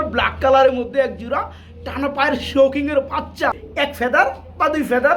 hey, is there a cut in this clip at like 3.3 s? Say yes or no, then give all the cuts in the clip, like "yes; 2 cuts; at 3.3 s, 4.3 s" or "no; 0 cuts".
yes; 1 cut; at 3.3 s